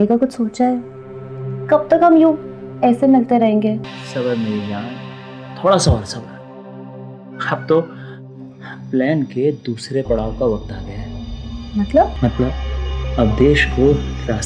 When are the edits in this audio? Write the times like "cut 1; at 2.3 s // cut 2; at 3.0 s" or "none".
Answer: cut 1; at 4.0 s // cut 2; at 12.1 s